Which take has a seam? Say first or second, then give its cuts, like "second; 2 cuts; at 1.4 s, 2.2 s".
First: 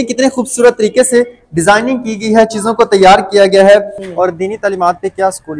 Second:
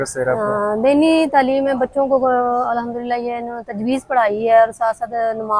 first; 1 cut; at 3.9 s